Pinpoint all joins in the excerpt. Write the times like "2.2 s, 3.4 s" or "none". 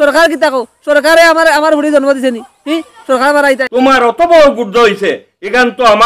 3.7 s